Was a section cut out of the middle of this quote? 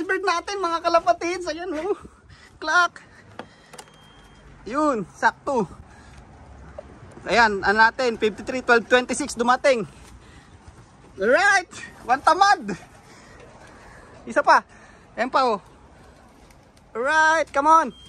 no; 0 cuts

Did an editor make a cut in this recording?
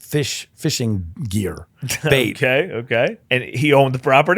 yes; 1 cut; at 3.3 s

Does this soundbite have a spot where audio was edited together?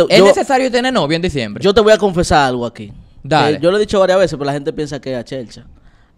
no; 0 cuts

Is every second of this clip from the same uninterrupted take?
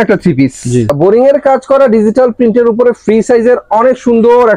no; 1 cut; at 0.9 s

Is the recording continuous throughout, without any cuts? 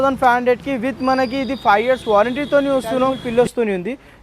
no; 1 cut; at 3.2 s

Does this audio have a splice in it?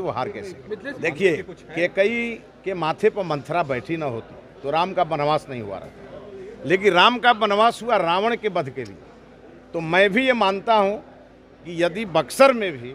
yes; 1 cut; at 0.9 s

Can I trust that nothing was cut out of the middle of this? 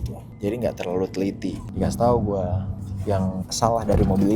no; 2 cuts; at 1.6 s, 3.5 s

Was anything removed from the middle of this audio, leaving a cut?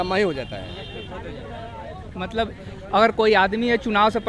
no; 0 cuts

